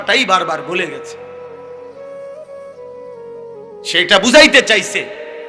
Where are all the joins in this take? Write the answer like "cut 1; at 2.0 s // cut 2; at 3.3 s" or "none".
cut 1; at 1.3 s // cut 2; at 3.9 s